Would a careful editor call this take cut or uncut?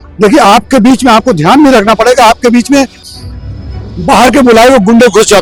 uncut